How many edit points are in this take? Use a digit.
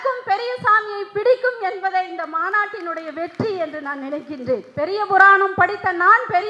1